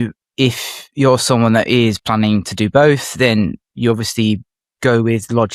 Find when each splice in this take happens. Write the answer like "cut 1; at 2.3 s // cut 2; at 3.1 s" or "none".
none